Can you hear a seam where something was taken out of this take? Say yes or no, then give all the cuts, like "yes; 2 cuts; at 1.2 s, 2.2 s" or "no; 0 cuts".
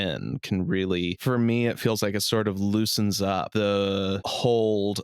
yes; 3 cuts; at 1.2 s, 3.5 s, 4.3 s